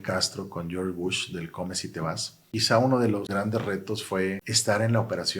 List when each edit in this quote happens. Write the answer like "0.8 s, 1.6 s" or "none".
2.4 s, 3.3 s, 4.5 s